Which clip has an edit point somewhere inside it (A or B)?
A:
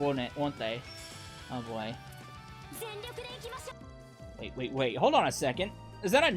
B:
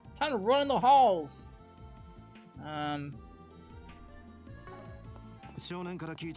A